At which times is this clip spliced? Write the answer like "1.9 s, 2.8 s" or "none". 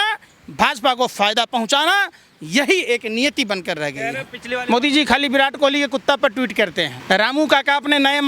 4.3 s, 7.0 s